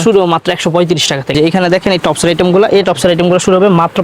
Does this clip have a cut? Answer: yes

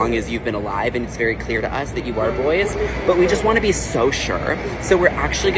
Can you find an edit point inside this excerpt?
no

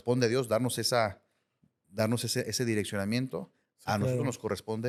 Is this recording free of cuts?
yes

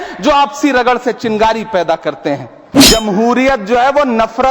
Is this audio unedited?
no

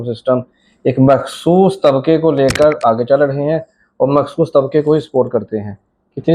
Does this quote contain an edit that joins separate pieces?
no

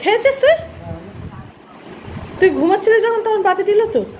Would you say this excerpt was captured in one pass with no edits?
yes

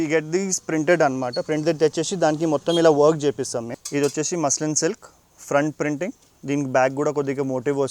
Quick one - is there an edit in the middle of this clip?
yes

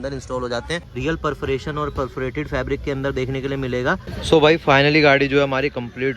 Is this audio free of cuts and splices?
no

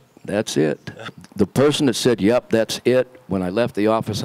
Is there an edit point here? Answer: yes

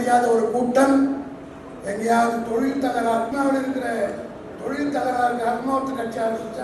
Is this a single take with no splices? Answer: no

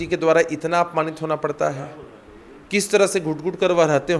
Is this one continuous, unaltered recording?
yes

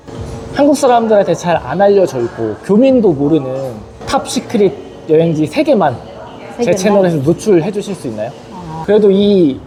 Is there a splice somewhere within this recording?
no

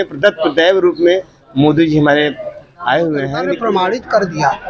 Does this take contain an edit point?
yes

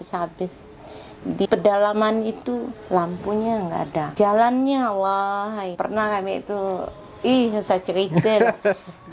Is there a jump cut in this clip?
yes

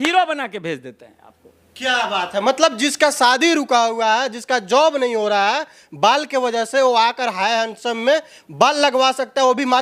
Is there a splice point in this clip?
no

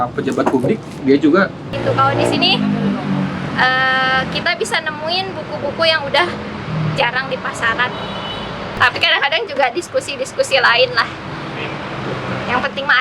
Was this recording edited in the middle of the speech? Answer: yes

